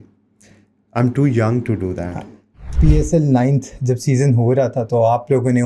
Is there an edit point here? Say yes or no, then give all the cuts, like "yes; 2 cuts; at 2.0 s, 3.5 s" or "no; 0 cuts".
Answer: yes; 1 cut; at 2.7 s